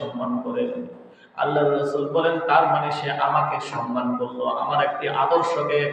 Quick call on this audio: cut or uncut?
uncut